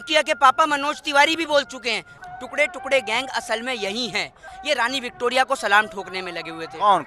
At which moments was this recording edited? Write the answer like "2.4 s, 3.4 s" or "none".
2.1 s, 4.5 s